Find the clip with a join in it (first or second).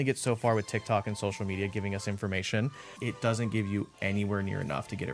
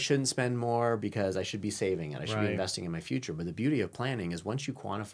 first